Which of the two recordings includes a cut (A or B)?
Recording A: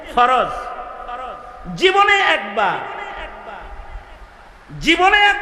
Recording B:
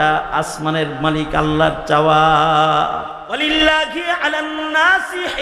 B